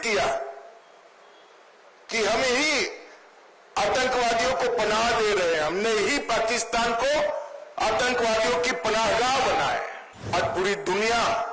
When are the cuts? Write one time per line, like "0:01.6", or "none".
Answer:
0:10.3